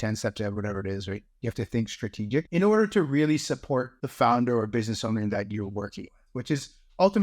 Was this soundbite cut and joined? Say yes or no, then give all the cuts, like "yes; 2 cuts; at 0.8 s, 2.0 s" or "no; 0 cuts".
yes; 2 cuts; at 2.5 s, 4.0 s